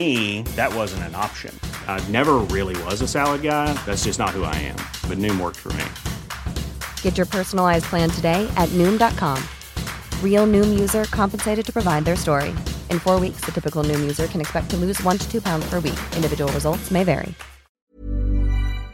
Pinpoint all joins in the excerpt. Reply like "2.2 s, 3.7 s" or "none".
17.8 s